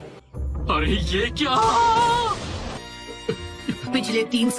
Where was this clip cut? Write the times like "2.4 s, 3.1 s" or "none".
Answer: 2.8 s